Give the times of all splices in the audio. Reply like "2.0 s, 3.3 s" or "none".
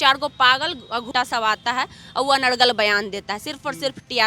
1.1 s